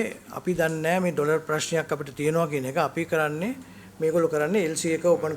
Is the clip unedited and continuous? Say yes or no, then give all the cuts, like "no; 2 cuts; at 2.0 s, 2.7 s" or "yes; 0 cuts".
yes; 0 cuts